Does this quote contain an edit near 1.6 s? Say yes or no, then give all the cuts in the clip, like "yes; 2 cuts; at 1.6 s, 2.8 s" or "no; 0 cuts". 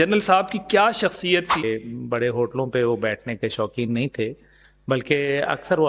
yes; 1 cut; at 1.6 s